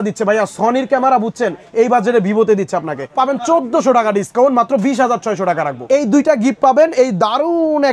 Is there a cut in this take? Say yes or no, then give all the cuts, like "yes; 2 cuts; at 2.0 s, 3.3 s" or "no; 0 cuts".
yes; 2 cuts; at 3.1 s, 5.7 s